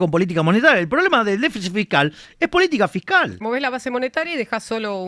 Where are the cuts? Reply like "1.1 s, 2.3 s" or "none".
3.4 s